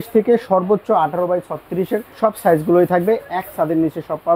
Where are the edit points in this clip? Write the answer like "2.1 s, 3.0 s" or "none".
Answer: 2.1 s